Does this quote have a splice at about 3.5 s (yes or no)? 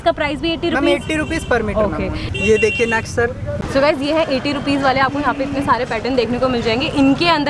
yes